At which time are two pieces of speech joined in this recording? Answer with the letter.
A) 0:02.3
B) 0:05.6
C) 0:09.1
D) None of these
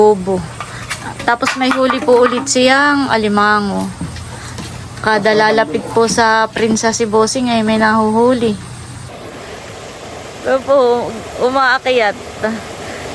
C